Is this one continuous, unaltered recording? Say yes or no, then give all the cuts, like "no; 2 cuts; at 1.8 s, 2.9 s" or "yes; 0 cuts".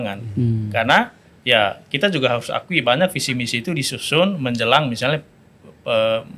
yes; 0 cuts